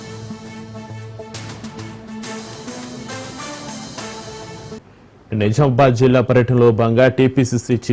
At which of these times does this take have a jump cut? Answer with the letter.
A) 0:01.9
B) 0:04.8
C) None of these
B